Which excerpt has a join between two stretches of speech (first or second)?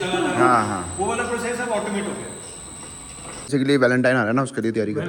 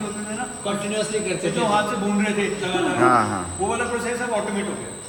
first